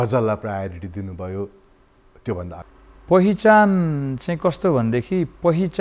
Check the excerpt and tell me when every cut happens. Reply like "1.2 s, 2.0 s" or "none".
2.7 s